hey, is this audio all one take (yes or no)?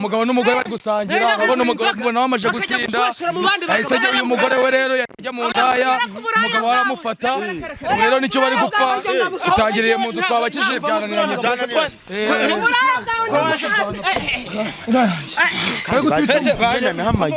yes